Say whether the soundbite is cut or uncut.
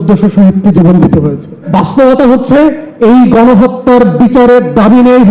cut